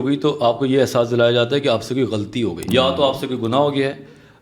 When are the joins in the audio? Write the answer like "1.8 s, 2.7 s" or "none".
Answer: 2.7 s

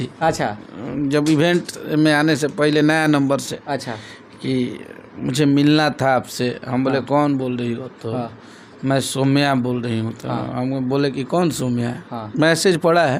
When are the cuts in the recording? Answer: none

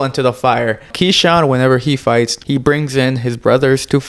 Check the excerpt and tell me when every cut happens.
0.9 s, 2.4 s

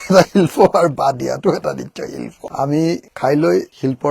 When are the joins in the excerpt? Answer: 2.4 s

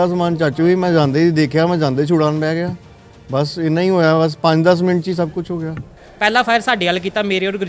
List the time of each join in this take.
6.0 s

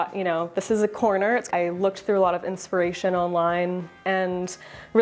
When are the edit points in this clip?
1.5 s, 3.9 s

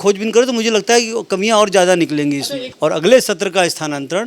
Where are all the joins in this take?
2.6 s

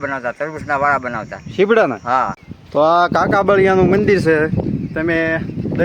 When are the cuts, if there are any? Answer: 2.4 s

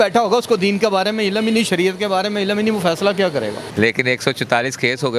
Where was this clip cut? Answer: 3.6 s

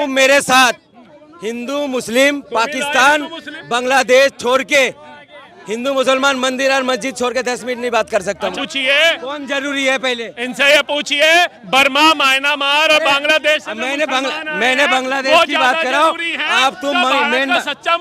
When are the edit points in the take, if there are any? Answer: 8.6 s

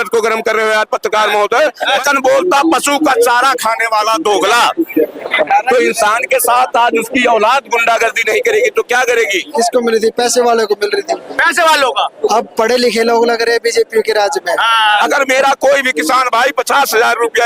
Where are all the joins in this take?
2.0 s, 9.4 s, 15.0 s

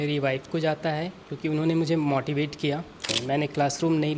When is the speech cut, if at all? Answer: 3.2 s

